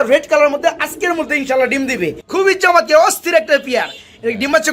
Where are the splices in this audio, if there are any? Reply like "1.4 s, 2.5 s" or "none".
2.2 s